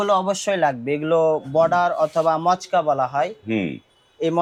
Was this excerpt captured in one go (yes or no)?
yes